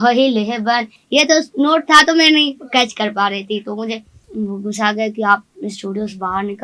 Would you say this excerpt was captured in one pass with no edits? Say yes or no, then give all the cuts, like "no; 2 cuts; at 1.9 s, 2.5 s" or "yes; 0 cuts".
no; 1 cut; at 4.2 s